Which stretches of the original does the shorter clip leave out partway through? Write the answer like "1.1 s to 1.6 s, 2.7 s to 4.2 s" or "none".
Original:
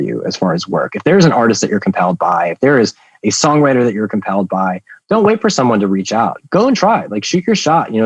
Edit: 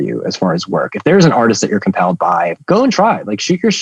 2.5 s to 6.4 s